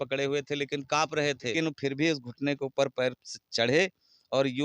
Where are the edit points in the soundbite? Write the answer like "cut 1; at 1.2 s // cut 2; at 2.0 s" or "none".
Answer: cut 1; at 1.5 s